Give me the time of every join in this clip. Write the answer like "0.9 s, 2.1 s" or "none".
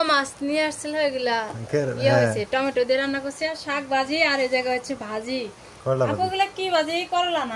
none